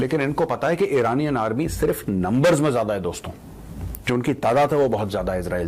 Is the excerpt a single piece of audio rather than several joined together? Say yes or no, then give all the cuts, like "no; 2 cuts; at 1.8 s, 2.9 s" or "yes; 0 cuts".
yes; 0 cuts